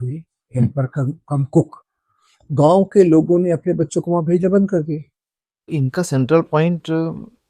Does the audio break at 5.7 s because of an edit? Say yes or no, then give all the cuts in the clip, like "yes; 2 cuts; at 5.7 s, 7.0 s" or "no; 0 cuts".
yes; 1 cut; at 5.7 s